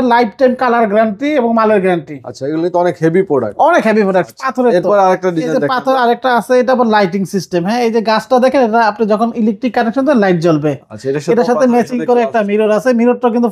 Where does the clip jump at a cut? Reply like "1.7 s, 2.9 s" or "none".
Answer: none